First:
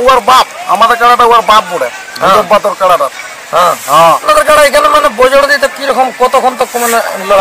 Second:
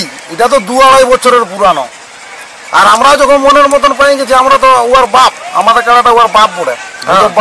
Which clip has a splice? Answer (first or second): first